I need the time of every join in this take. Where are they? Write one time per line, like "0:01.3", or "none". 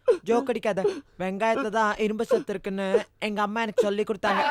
none